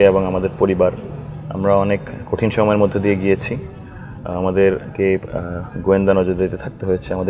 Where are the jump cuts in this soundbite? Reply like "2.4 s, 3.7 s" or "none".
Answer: none